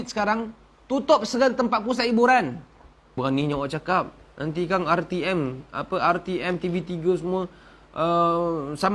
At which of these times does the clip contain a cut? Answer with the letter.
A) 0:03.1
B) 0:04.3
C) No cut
A